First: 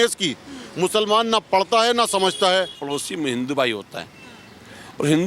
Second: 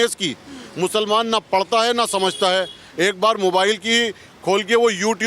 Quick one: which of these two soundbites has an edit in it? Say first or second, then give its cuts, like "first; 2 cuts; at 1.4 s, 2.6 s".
first; 1 cut; at 2.8 s